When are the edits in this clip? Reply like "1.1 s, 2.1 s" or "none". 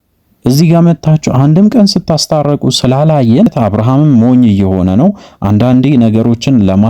3.5 s